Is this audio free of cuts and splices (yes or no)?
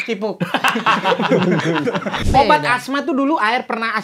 no